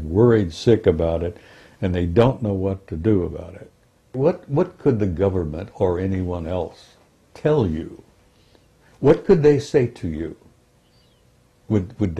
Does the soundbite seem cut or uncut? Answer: cut